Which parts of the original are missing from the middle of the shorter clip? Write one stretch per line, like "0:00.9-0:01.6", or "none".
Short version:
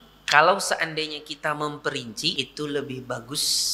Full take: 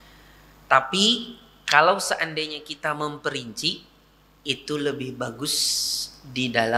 0:03.7-0:04.4